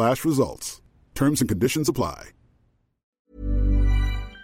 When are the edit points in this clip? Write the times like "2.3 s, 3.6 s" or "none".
3.2 s